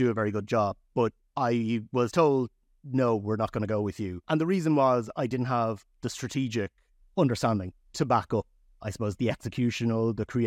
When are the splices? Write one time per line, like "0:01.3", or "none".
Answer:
0:01.2
0:04.2
0:07.0
0:08.7